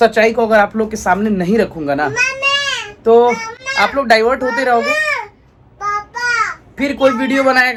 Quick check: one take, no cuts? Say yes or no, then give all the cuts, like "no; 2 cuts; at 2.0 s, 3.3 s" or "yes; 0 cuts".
yes; 0 cuts